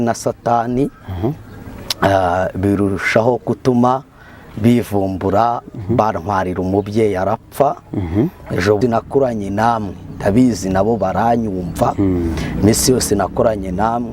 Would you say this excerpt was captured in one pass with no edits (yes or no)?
no